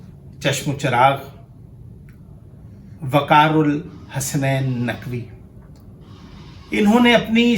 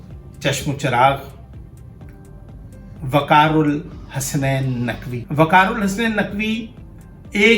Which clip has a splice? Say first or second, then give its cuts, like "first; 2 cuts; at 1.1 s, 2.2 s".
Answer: second; 1 cut; at 5.1 s